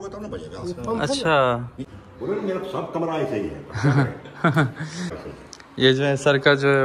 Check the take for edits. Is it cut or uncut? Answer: cut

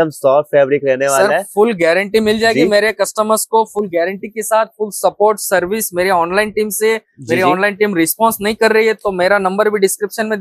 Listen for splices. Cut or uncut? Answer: uncut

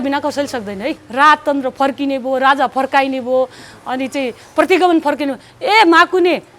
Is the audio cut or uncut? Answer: cut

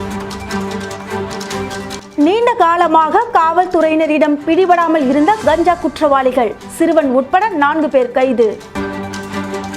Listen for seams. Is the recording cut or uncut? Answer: cut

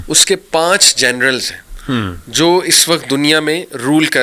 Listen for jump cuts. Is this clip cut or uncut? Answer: uncut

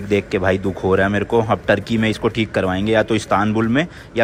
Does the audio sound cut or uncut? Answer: uncut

